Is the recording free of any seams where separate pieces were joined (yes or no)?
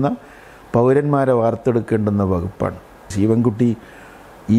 no